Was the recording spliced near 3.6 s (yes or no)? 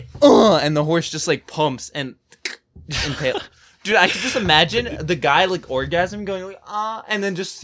no